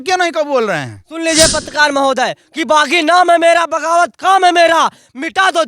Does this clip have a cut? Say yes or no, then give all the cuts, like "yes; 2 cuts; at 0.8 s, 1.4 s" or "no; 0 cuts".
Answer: yes; 1 cut; at 1.0 s